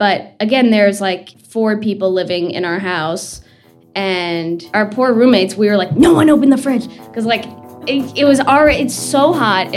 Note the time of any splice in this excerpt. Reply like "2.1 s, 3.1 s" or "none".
1.4 s, 4.7 s